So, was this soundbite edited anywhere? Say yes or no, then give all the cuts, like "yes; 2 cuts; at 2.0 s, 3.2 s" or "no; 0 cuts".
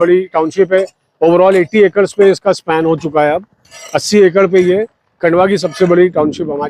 no; 0 cuts